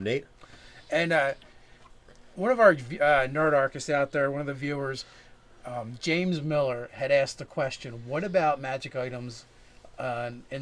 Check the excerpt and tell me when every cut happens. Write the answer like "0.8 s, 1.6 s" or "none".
5.8 s